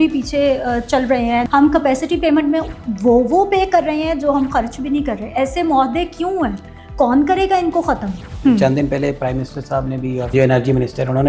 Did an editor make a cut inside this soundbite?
yes; 3 cuts; at 1.5 s, 8.3 s, 10.3 s

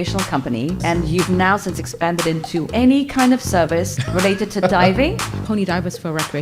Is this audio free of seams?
no; 4 cuts; at 0.8 s, 2.7 s, 4.0 s, 5.3 s

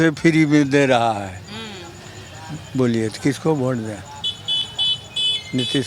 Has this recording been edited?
no; 0 cuts

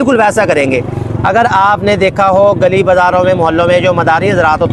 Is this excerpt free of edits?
yes; 0 cuts

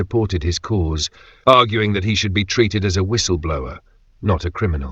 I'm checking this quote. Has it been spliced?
no; 0 cuts

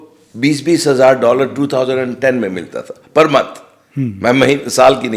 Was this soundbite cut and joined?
no; 0 cuts

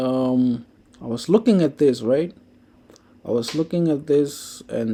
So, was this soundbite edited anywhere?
no; 0 cuts

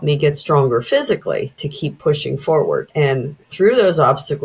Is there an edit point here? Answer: no; 0 cuts

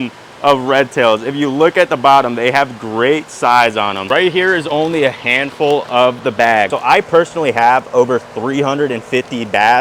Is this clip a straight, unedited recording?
no; 2 cuts; at 4.0 s, 6.7 s

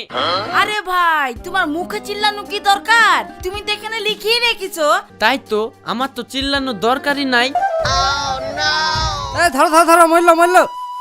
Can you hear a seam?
yes; 2 cuts; at 5.1 s, 7.6 s

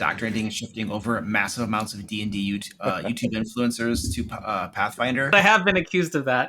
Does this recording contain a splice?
yes; 1 cut; at 5.3 s

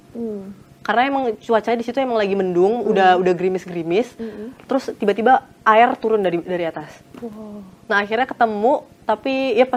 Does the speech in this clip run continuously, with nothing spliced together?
yes; 0 cuts

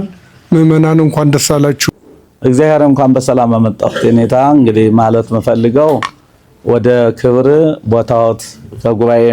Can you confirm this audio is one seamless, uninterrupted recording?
no; 1 cut; at 1.8 s

